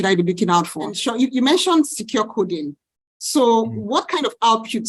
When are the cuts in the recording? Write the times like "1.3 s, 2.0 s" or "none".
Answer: 0.9 s